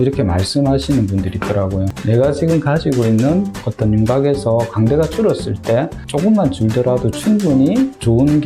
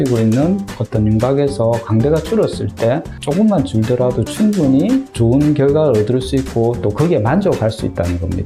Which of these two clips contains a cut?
first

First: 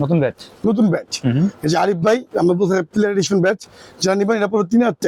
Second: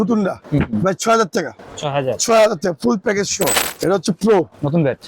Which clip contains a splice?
second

